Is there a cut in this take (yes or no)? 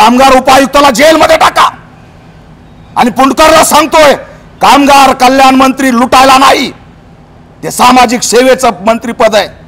no